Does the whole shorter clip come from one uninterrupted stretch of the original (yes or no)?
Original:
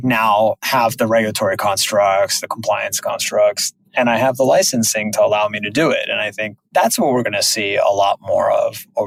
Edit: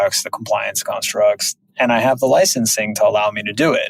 yes